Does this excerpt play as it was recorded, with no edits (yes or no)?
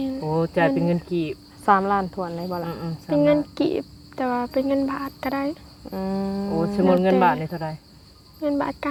yes